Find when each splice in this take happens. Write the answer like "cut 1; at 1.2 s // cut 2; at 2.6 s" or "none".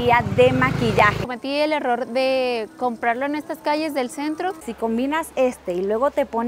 cut 1; at 1.2 s // cut 2; at 4.6 s